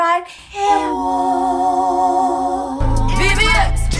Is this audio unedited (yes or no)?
no